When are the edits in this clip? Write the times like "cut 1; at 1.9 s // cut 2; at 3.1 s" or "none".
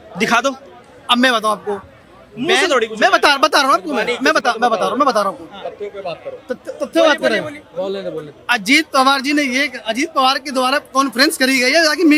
none